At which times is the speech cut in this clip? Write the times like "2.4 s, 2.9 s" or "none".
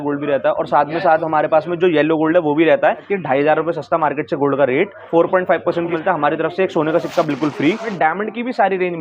3.1 s, 5.0 s, 5.9 s, 7.9 s